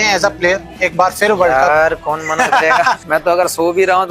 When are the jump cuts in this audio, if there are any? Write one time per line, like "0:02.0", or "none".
0:03.0